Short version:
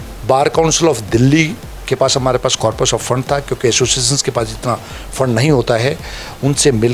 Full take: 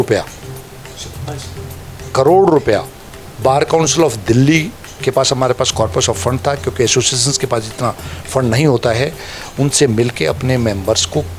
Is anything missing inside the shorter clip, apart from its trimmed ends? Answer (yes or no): no